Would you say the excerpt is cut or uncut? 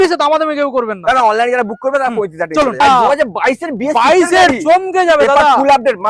cut